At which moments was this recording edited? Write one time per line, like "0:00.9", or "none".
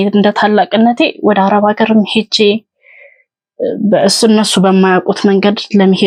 none